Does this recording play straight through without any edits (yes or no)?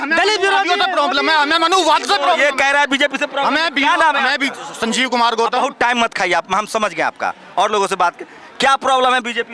yes